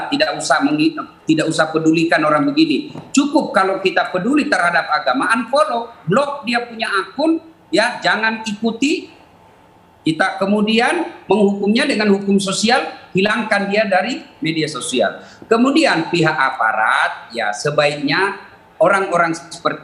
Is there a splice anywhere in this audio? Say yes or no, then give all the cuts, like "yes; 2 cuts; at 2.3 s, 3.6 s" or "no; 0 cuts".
no; 0 cuts